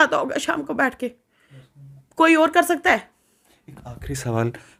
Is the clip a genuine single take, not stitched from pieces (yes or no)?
yes